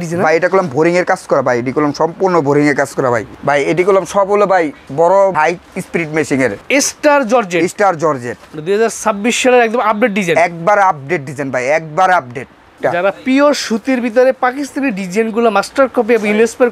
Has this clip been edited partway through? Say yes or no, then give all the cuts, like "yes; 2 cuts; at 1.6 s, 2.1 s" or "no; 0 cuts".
yes; 4 cuts; at 3.3 s, 5.4 s, 6.6 s, 12.7 s